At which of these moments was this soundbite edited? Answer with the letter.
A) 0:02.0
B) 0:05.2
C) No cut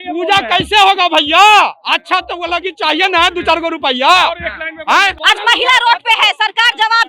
B